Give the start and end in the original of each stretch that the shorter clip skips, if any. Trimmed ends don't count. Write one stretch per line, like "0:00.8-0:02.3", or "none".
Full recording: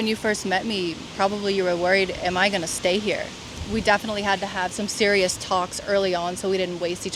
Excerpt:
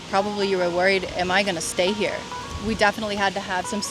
none